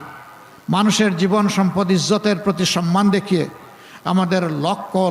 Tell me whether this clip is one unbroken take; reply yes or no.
yes